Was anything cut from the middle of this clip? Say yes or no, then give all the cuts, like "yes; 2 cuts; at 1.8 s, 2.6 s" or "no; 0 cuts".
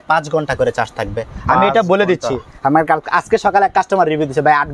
no; 0 cuts